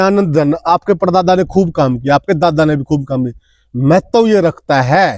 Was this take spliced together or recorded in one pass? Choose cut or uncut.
uncut